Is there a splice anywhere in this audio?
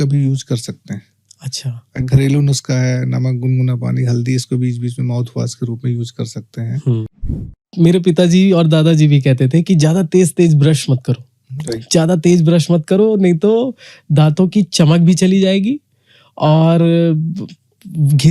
yes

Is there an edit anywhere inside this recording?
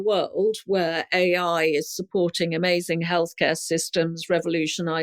no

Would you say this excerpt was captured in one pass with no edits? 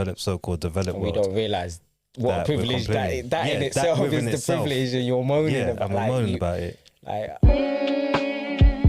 no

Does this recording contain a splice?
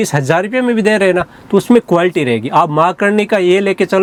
no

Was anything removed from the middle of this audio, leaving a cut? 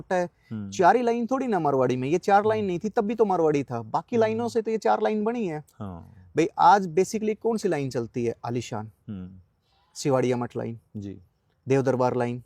no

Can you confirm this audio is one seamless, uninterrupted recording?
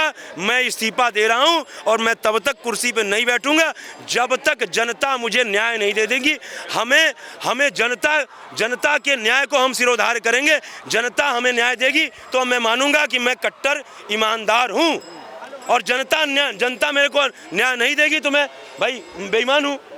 yes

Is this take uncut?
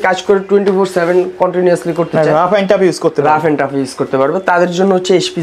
yes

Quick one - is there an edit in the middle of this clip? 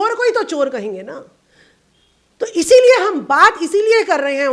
no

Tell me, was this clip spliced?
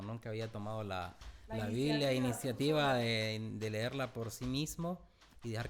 no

